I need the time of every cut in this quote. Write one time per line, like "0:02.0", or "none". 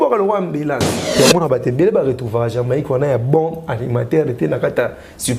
0:01.0